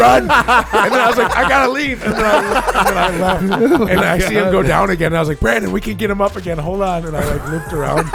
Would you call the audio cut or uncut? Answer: uncut